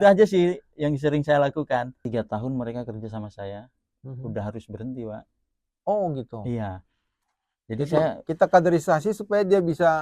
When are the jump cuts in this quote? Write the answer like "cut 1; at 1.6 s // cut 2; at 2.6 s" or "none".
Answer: cut 1; at 2.0 s